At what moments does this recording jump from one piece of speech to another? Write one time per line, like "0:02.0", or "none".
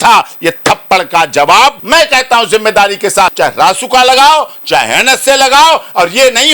0:01.8
0:03.3